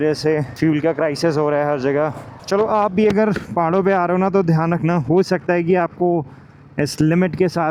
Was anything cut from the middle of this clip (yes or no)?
no